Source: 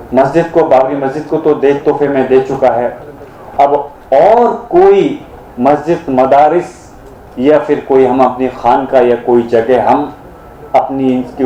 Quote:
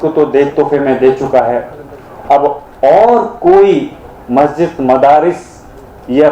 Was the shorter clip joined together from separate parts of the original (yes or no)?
no